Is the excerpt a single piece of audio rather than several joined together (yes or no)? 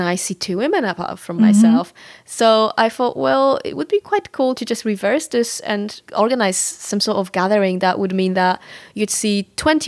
yes